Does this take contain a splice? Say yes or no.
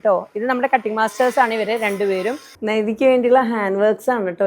yes